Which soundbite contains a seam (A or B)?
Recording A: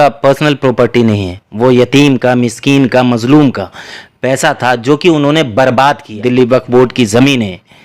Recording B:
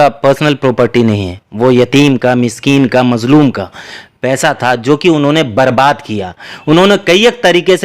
A